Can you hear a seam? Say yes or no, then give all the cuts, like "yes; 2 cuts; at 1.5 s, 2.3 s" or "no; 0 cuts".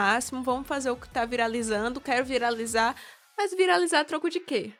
no; 0 cuts